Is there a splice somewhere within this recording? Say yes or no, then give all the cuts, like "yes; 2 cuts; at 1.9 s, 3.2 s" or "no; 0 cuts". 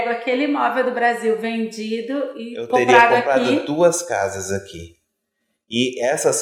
no; 0 cuts